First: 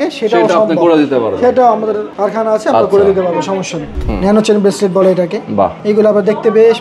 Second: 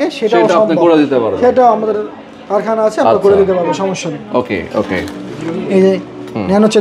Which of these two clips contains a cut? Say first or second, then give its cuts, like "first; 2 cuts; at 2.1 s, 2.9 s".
first; 3 cuts; at 2.1 s, 3.9 s, 5.8 s